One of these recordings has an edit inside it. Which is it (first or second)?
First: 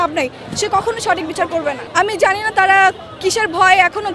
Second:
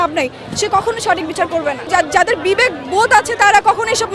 second